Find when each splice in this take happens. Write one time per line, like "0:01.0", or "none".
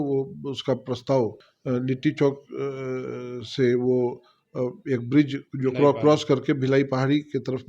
0:01.5